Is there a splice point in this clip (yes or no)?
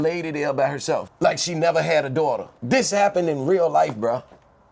yes